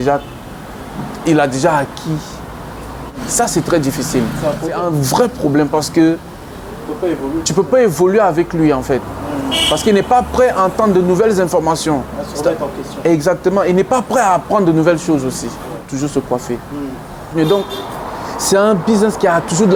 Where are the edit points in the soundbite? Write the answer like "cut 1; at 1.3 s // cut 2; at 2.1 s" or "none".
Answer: cut 1; at 3.2 s // cut 2; at 4.8 s // cut 3; at 15.9 s // cut 4; at 17.3 s

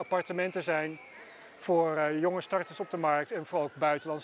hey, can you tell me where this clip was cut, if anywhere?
none

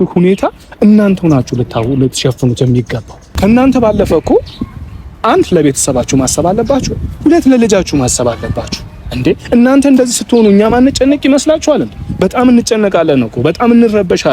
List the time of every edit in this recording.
cut 1; at 3.2 s

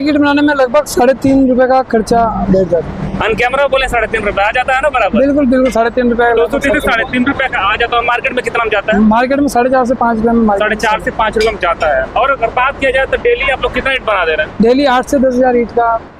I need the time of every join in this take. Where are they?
none

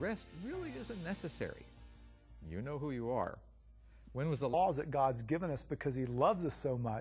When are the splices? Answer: none

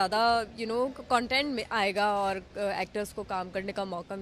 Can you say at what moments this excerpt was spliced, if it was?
none

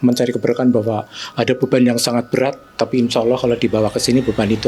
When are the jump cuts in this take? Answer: none

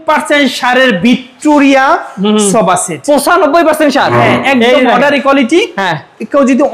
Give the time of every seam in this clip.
none

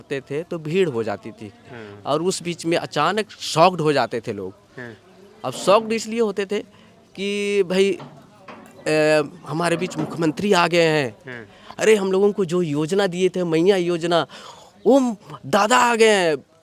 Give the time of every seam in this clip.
none

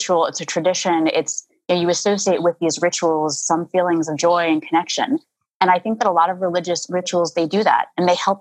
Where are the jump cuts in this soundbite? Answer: none

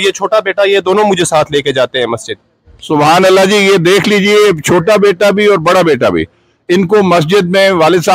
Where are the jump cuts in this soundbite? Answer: none

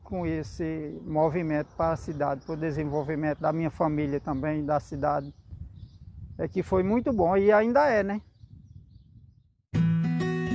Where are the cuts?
cut 1; at 9.6 s

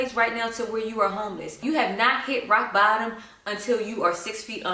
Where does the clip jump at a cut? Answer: cut 1; at 1.6 s

